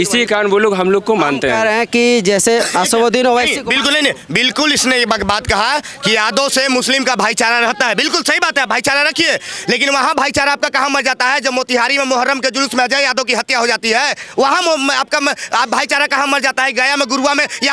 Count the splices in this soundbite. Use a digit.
0